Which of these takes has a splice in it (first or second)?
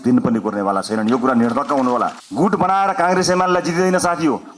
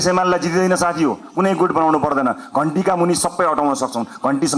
first